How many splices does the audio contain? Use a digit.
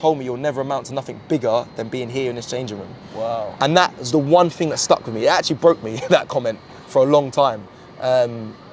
0